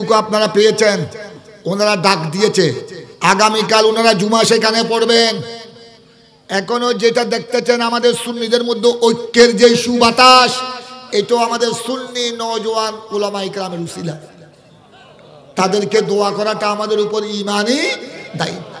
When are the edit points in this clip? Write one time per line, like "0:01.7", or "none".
none